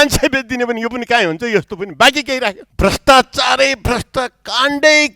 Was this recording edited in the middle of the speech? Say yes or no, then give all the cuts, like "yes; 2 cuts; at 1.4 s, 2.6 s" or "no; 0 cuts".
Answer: yes; 1 cut; at 2.7 s